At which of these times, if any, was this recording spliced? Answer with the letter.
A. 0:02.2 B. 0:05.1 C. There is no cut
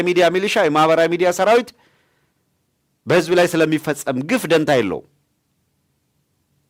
C